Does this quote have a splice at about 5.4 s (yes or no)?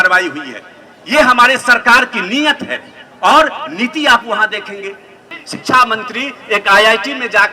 yes